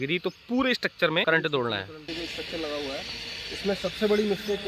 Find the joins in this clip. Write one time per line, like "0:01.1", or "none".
0:01.2
0:02.2